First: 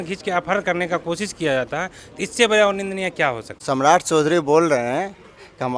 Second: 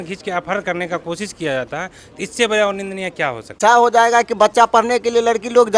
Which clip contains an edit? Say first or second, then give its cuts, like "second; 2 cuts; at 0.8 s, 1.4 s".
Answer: second; 1 cut; at 3.6 s